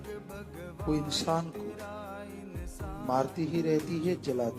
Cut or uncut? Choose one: cut